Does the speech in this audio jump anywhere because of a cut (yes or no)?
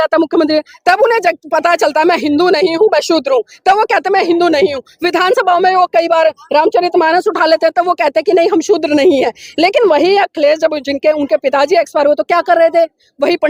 no